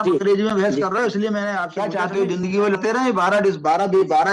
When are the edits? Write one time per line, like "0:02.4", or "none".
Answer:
0:01.7
0:02.8